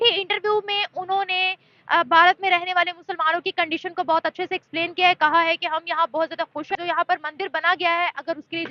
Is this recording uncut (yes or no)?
no